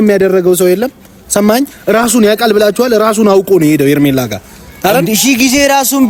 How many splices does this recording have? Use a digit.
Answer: 0